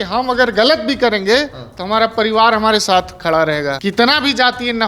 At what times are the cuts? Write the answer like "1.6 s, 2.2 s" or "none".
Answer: 3.8 s